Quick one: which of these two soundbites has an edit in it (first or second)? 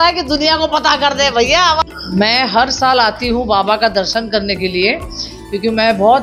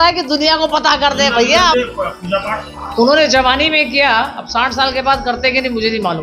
second